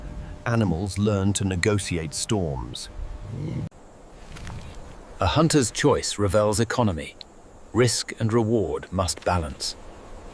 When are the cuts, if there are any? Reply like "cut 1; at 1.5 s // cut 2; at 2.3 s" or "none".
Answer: none